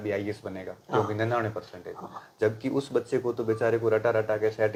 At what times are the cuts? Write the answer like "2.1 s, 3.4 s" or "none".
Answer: none